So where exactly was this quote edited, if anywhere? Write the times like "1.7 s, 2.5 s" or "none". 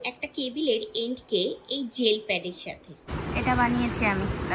3.1 s